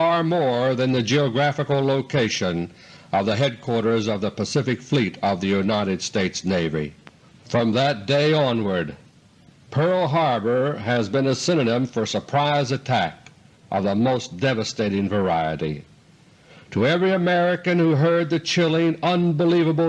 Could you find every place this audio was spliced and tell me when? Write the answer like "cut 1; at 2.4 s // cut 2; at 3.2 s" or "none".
cut 1; at 9.7 s